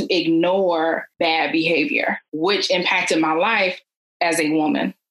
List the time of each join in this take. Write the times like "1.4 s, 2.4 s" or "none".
1.1 s, 2.3 s